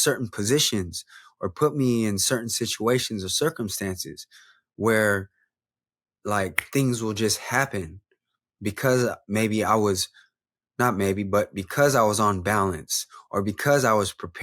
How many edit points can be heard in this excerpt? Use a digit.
0